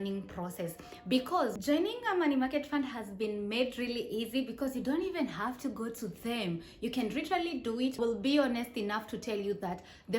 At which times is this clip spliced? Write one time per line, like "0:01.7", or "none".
0:01.6
0:08.0